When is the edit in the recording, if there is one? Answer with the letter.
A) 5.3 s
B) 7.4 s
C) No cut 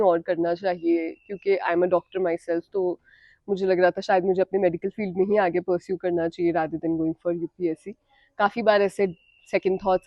C